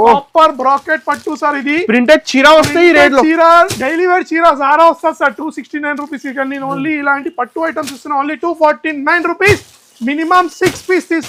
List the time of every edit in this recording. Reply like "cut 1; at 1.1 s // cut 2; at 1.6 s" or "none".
none